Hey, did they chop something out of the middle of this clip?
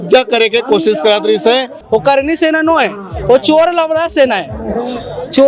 yes; 1 cut; at 1.8 s

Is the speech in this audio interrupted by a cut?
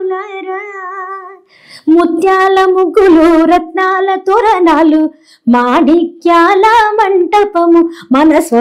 no; 0 cuts

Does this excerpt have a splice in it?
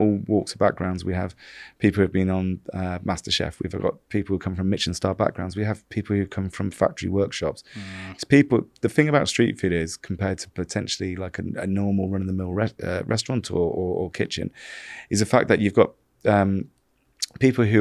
no; 0 cuts

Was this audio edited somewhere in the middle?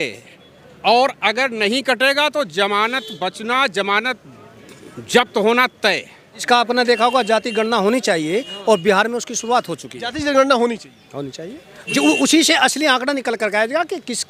yes; 1 cut; at 6.4 s

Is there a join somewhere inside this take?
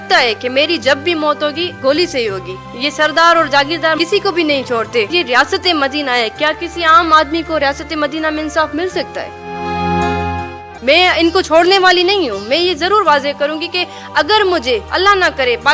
yes; 2 cuts; at 5.1 s, 10.7 s

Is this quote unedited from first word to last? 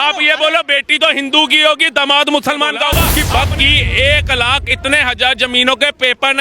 no; 1 cut; at 3.1 s

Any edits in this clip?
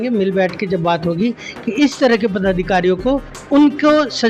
yes; 1 cut; at 3.3 s

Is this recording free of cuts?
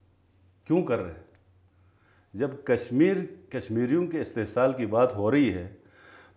yes; 0 cuts

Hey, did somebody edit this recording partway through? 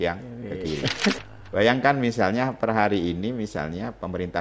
yes; 1 cut; at 1.2 s

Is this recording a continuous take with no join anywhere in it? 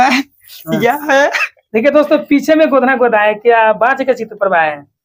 yes; 0 cuts

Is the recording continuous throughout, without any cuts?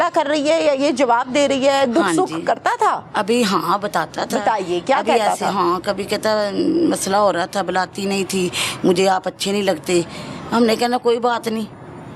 yes; 0 cuts

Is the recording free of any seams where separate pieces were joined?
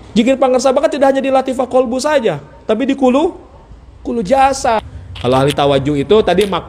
no; 1 cut; at 4.8 s

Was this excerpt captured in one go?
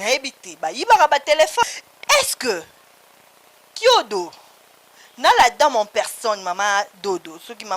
no; 1 cut; at 1.6 s

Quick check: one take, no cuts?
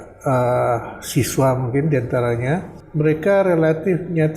no; 1 cut; at 2.8 s

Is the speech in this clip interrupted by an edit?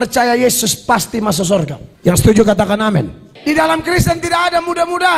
yes; 2 cuts; at 1.8 s, 3.2 s

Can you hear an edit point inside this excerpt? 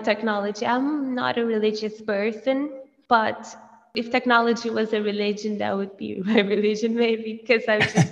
yes; 2 cuts; at 2.9 s, 3.9 s

